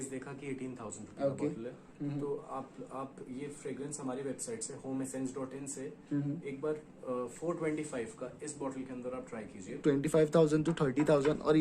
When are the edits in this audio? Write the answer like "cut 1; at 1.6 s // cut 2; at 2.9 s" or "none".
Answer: cut 1; at 9.8 s